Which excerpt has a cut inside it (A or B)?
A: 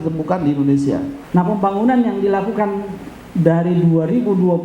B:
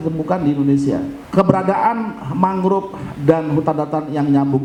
A